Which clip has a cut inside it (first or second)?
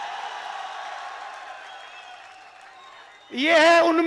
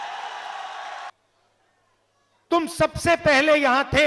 second